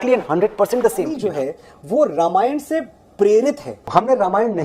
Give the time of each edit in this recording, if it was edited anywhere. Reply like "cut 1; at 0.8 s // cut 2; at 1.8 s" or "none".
cut 1; at 1.1 s